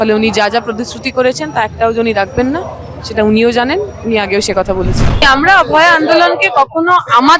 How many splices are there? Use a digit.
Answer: 1